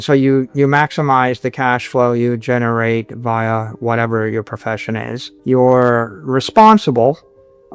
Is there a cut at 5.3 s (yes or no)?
yes